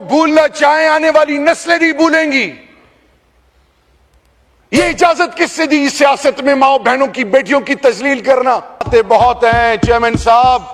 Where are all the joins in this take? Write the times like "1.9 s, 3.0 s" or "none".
8.9 s